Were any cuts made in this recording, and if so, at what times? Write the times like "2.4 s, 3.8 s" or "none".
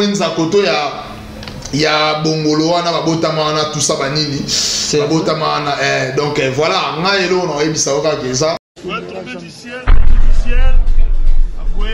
8.7 s

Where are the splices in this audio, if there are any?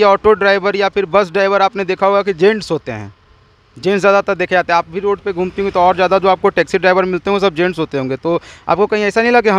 none

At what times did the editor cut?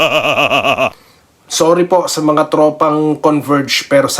0.9 s

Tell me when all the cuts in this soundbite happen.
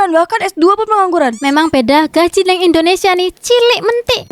1.4 s

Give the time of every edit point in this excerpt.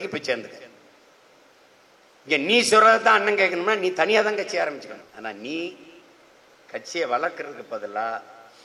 5.1 s

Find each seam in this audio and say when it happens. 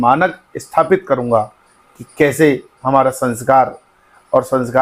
none

